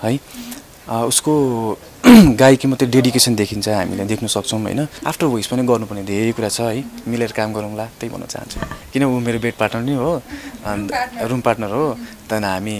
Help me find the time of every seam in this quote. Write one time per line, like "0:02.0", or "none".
0:05.0
0:08.7